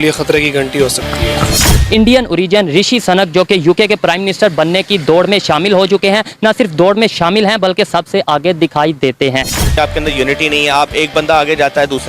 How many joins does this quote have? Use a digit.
2